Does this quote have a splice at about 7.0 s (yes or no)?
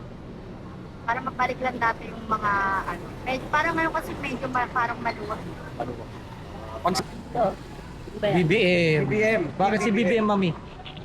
yes